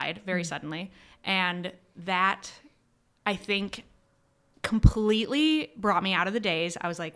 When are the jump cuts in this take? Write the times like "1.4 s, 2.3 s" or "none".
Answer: none